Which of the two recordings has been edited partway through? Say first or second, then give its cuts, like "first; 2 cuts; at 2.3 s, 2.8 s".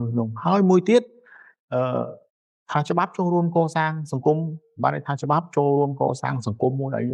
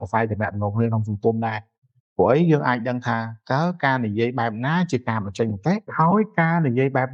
second; 1 cut; at 5.9 s